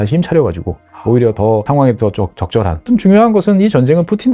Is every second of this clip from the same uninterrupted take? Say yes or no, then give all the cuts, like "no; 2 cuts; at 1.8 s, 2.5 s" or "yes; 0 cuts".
no; 2 cuts; at 1.7 s, 2.9 s